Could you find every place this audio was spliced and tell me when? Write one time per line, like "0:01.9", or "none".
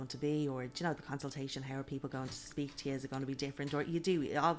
none